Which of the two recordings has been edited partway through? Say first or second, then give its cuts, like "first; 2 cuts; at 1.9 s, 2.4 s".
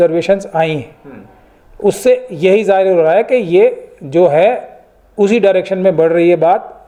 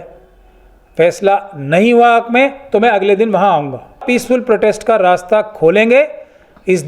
second; 1 cut; at 4.0 s